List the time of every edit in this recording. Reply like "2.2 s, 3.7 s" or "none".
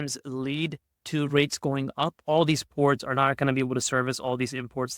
2.2 s

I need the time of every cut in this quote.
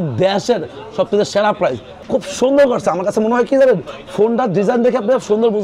2.0 s

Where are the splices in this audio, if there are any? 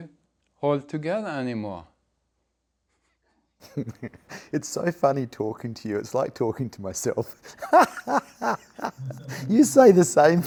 none

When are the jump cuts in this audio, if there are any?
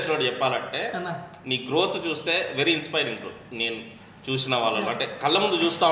none

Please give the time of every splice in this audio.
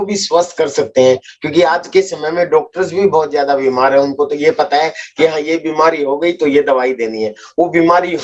none

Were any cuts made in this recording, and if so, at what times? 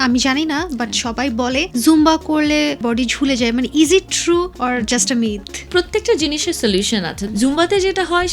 1.7 s, 2.8 s, 4.5 s, 5.7 s, 7.2 s

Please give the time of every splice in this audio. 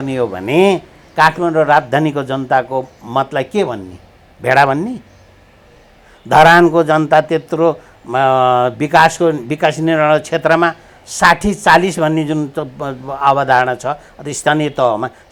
none

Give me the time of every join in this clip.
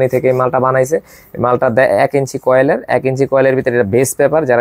none

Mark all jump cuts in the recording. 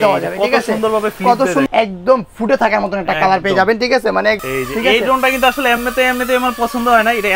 1.7 s, 4.4 s

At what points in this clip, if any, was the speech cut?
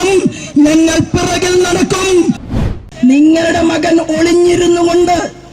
2.5 s

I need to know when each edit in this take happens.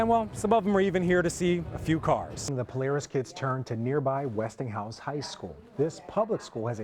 2.5 s

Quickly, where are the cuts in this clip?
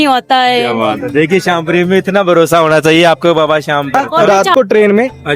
3.9 s

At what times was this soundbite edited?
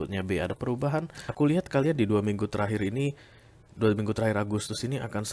1.2 s

